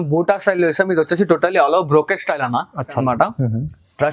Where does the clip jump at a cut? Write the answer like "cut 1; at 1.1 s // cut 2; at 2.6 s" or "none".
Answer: cut 1; at 2.9 s